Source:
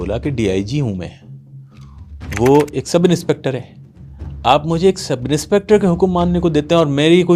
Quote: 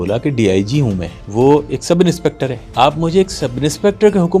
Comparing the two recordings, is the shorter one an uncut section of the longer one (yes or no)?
no